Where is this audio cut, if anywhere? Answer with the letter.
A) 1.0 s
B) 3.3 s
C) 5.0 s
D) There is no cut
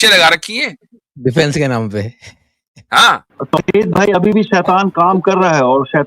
B